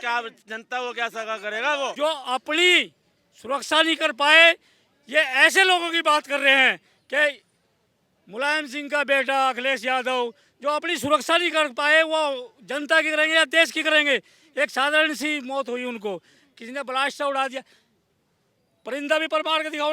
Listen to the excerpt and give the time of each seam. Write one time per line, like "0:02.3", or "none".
0:02.0